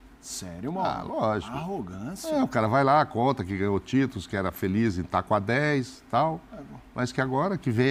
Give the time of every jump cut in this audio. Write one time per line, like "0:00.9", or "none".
none